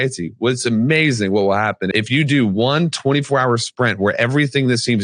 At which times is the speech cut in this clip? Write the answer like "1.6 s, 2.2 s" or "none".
1.9 s